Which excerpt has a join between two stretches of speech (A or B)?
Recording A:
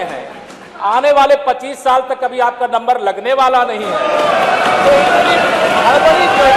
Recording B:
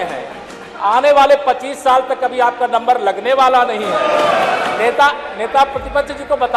B